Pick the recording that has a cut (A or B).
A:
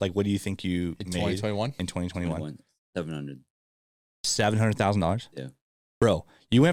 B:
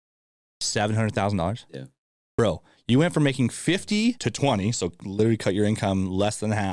B